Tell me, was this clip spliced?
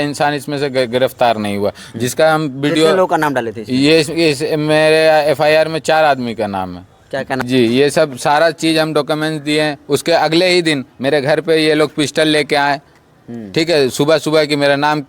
yes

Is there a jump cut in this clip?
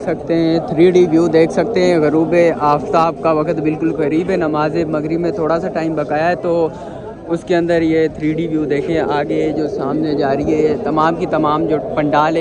no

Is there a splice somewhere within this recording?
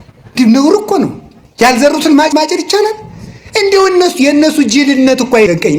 no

